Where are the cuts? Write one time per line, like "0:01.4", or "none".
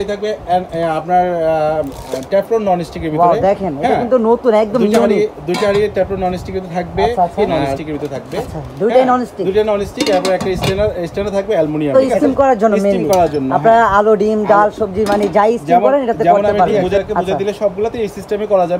0:07.4
0:12.0
0:16.8